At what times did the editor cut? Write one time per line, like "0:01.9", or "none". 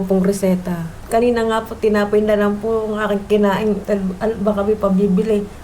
0:00.9
0:03.8